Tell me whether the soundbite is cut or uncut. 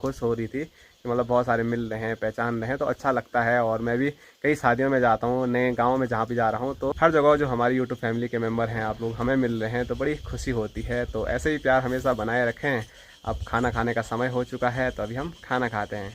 uncut